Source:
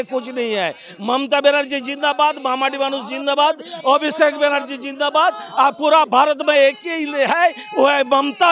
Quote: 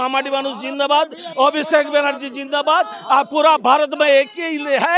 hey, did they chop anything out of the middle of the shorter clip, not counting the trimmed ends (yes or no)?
no